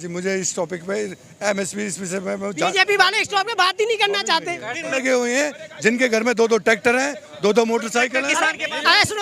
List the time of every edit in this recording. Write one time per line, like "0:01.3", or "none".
0:05.0